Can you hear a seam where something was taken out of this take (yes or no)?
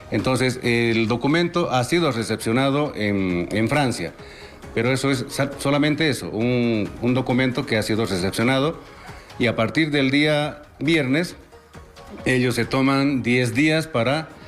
no